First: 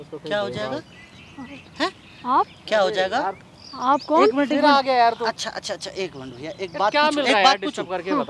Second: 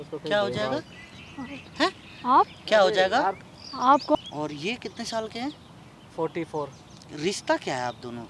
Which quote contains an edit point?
second; 1 cut; at 4.2 s

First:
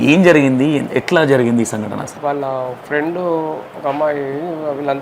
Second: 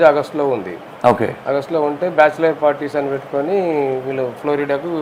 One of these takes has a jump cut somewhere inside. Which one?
first; 1 cut; at 2.1 s

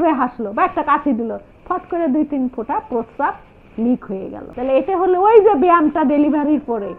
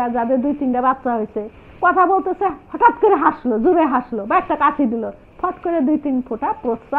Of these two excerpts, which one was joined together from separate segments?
first; 1 cut; at 4.4 s

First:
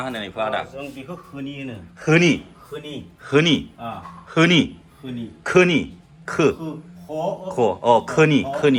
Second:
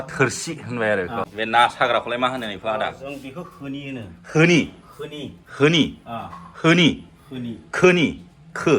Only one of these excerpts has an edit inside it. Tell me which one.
second; 1 cut; at 1.3 s

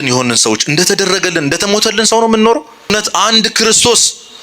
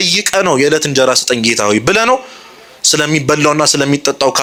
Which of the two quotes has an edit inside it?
first; 1 cut; at 2.9 s

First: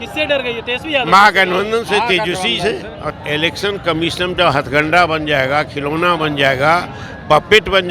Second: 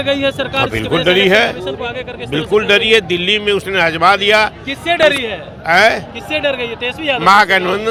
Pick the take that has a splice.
first; 1 cut; at 3.1 s

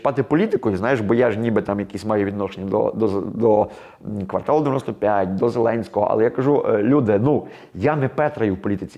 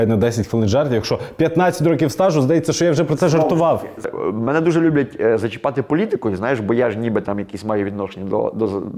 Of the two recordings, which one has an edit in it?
second; 1 cut; at 4.1 s

